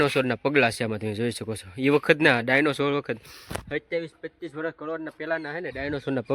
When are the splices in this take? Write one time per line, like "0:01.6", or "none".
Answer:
none

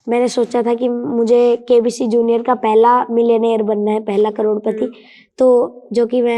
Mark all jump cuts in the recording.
none

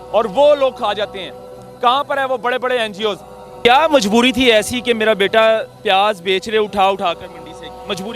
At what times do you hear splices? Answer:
0:03.5

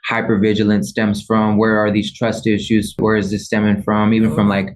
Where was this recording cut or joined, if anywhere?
0:03.0

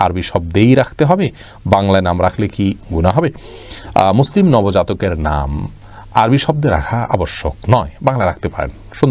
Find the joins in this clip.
none

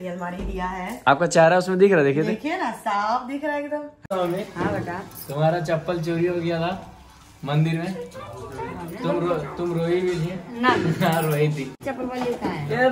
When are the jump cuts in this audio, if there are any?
0:03.9
0:11.8

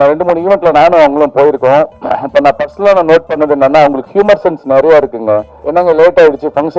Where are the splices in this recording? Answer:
0:05.5

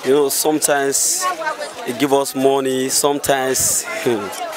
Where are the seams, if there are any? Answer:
none

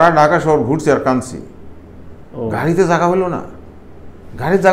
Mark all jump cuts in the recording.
none

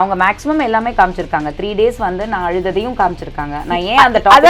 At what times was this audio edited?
none

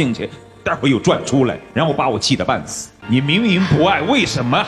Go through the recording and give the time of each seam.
0:02.8

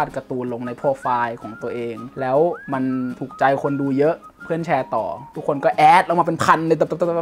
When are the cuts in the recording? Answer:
0:02.0
0:02.8

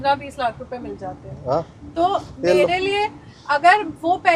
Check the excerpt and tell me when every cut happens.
none

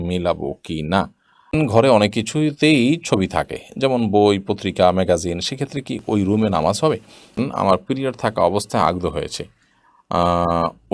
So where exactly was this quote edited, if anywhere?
0:01.5
0:07.4

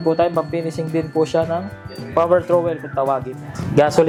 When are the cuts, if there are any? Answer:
none

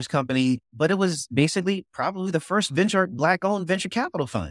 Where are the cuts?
none

